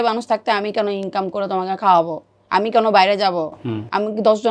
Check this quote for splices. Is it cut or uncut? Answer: uncut